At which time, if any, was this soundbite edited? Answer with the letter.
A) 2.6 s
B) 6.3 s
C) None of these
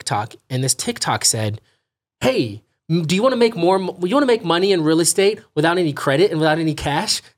C